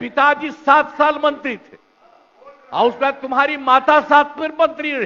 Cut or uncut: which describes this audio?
uncut